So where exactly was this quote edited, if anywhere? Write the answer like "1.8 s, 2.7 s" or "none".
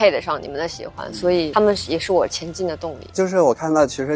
none